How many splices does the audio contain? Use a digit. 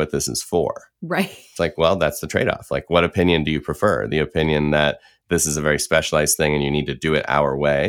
1